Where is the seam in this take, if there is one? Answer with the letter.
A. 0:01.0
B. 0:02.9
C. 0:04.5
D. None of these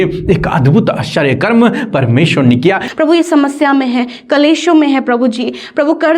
B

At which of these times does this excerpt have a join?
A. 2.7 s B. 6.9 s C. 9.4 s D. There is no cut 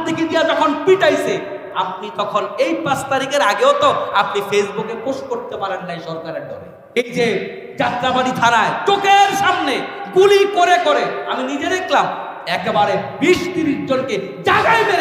B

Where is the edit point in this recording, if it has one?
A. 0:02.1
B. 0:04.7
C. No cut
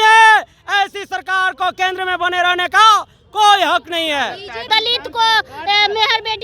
B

